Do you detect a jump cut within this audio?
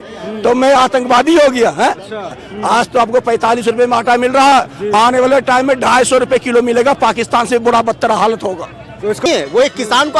yes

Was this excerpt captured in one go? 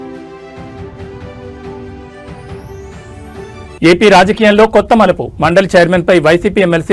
yes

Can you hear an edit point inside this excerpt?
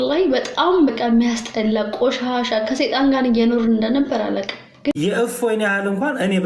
yes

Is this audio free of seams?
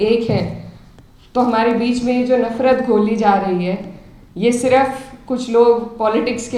yes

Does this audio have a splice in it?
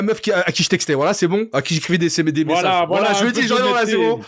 no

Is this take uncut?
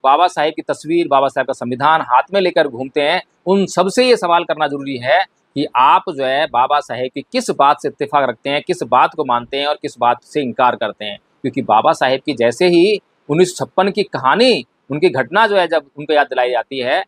yes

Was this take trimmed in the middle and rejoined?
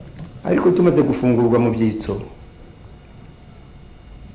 no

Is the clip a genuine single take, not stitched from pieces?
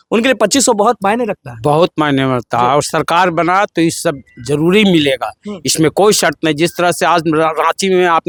yes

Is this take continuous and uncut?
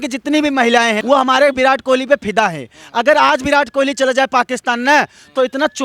no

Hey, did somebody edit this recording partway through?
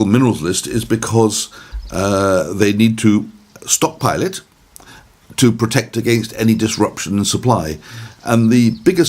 no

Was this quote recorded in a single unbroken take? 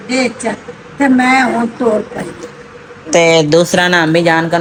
yes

